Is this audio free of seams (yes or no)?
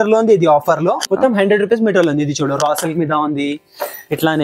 no